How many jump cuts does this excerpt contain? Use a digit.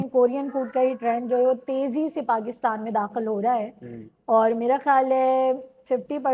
0